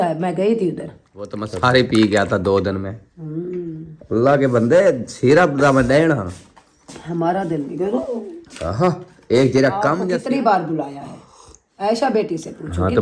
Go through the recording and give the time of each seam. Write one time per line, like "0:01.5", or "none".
0:01.4
0:10.0